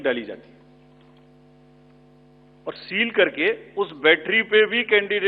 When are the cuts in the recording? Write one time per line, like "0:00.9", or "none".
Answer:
none

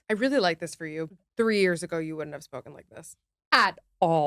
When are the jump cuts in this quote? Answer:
0:01.1

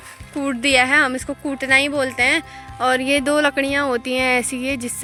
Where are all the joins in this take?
none

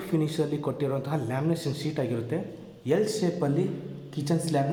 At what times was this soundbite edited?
none

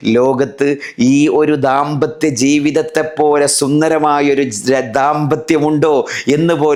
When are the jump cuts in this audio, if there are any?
none

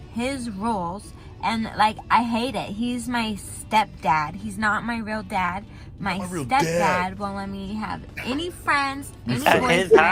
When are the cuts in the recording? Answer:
none

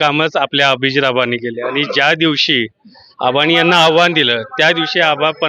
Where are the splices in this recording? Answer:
none

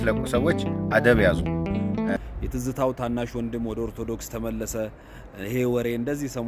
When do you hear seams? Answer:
0:02.2

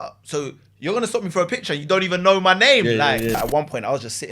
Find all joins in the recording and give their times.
0:03.4

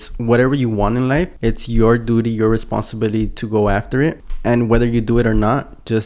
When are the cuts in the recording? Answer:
0:01.3
0:04.3

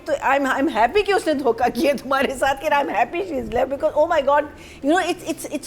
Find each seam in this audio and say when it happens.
none

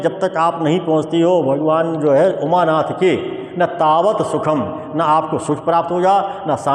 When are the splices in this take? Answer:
none

